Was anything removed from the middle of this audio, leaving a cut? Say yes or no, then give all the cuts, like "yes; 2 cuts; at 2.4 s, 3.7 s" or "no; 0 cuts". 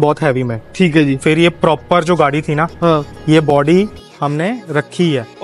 no; 0 cuts